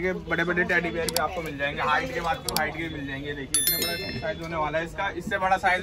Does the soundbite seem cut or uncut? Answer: uncut